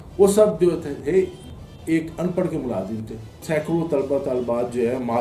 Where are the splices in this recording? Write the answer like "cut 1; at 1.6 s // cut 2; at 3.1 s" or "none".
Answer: cut 1; at 3.4 s

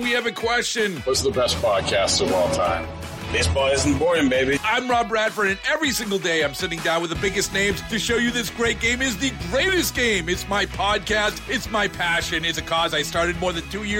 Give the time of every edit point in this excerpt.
none

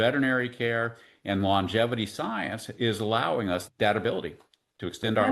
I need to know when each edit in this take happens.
cut 1; at 3.6 s

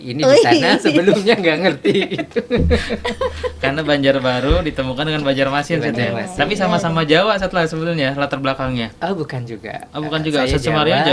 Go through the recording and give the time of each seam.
none

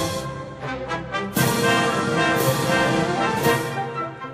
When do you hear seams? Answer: none

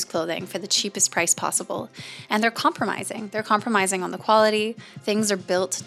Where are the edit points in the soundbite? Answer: none

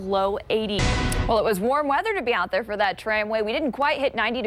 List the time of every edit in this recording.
cut 1; at 0.9 s

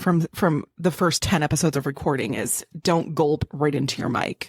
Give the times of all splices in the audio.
none

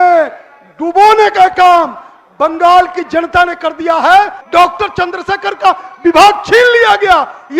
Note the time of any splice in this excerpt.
cut 1; at 4.4 s

